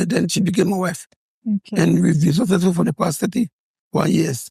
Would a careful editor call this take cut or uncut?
uncut